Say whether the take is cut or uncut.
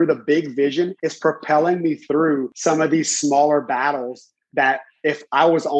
cut